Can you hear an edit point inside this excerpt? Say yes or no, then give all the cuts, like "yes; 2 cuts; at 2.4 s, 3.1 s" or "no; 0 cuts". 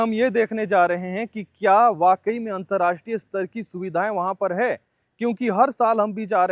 no; 0 cuts